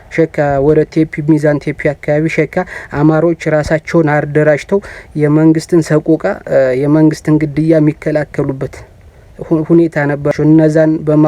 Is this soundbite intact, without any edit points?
no; 1 cut; at 10.3 s

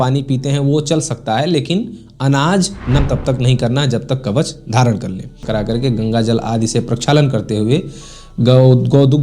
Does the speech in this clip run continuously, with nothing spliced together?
no; 2 cuts; at 3.0 s, 5.4 s

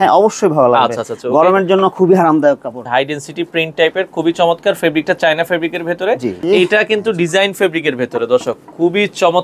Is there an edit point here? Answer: yes; 2 cuts; at 2.8 s, 6.4 s

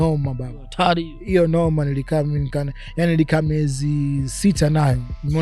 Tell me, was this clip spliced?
no; 0 cuts

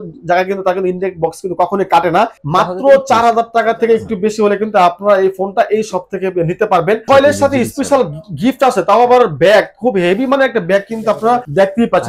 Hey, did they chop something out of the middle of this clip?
yes; 2 cuts; at 2.4 s, 7.0 s

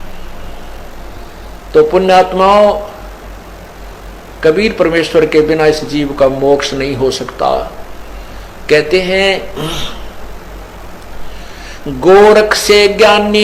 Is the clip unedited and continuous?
no; 1 cut; at 1.2 s

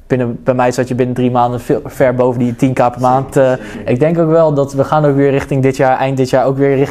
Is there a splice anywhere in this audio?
yes; 1 cut; at 3.7 s

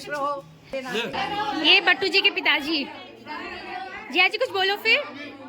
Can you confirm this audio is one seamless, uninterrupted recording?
no; 1 cut; at 1.2 s

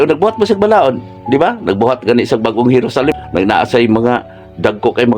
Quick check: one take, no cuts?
no; 1 cut; at 3.1 s

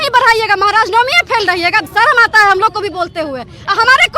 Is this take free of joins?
no; 1 cut; at 1.9 s

